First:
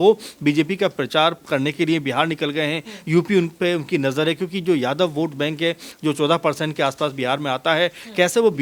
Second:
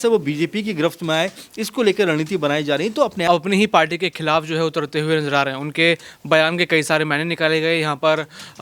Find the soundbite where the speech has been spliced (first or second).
second